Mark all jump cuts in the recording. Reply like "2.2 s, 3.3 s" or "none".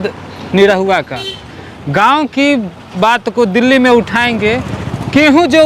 none